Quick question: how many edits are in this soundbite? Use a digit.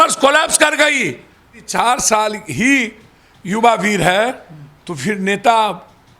1